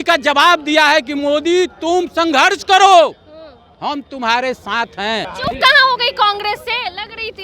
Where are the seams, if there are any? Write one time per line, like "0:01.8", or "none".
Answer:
0:05.3